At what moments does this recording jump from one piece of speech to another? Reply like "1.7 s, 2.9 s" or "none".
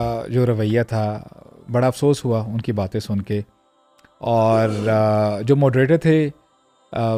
none